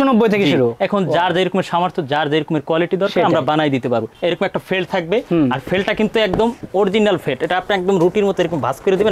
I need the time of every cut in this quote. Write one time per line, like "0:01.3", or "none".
0:04.1